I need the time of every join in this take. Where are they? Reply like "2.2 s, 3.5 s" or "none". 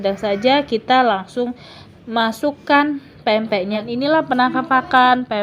3.8 s